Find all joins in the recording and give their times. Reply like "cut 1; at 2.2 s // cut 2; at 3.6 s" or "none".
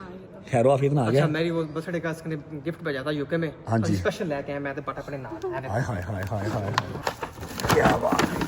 none